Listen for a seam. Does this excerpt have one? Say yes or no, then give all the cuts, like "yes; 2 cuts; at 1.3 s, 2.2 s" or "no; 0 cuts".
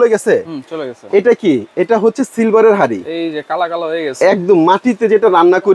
no; 0 cuts